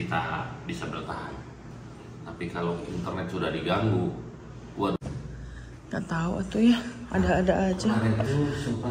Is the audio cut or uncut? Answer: cut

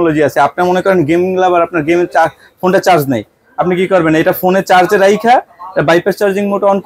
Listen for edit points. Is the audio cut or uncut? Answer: uncut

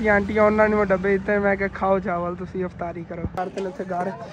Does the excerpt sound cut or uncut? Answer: cut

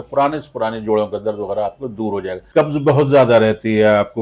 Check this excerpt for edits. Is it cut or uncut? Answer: cut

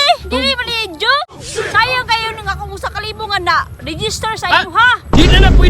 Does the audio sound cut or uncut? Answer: cut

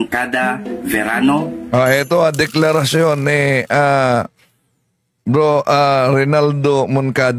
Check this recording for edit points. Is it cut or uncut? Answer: uncut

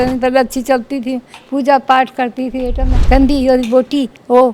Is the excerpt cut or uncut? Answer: cut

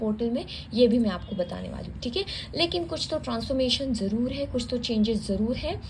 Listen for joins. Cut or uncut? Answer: uncut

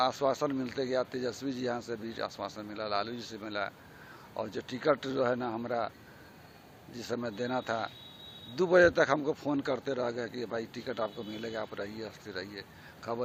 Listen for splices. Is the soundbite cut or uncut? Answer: uncut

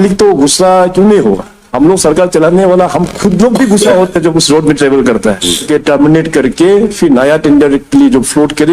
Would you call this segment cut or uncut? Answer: cut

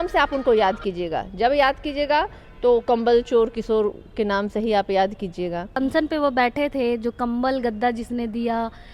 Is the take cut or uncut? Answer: cut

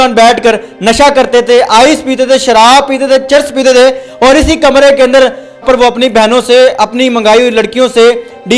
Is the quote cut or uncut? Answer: cut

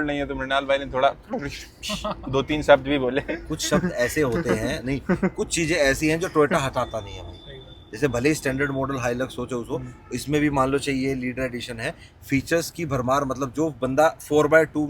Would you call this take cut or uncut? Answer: uncut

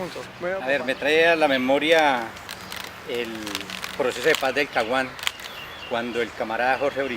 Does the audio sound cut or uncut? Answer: cut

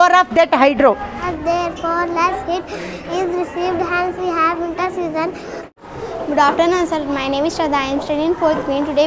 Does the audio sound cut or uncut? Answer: cut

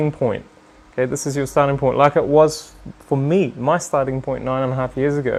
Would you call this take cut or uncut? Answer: uncut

